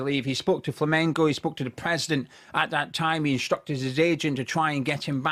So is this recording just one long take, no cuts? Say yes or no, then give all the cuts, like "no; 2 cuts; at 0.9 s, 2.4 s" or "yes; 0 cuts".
yes; 0 cuts